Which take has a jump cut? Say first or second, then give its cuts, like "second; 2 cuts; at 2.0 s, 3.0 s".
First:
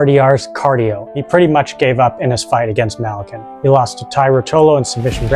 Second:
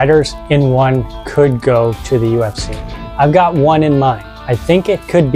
first; 2 cuts; at 1.1 s, 3.4 s